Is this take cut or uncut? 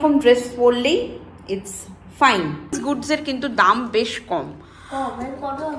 cut